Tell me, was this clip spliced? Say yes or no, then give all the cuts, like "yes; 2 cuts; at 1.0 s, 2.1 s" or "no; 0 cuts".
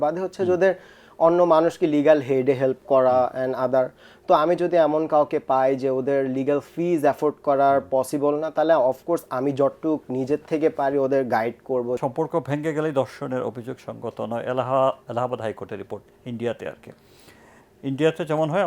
yes; 1 cut; at 12.0 s